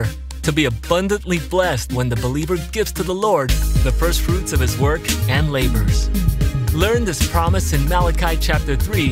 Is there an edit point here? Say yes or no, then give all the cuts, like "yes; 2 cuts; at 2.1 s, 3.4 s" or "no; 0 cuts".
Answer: no; 0 cuts